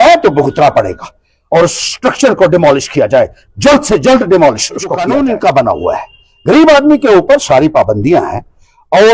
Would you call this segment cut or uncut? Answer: cut